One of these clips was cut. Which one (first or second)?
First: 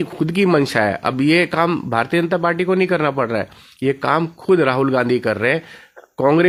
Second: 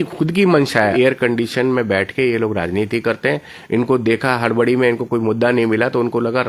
second